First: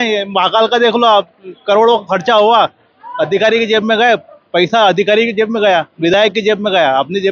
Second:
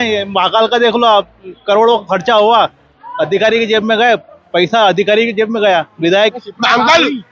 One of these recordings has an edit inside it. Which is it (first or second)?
second